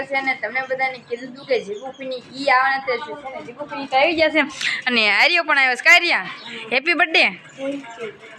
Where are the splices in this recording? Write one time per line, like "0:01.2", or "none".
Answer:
none